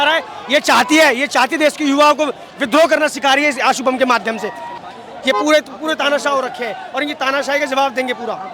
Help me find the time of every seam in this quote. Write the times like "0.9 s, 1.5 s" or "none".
4.7 s